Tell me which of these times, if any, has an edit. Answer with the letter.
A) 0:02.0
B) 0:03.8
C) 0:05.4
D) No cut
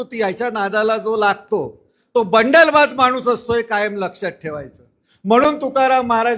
D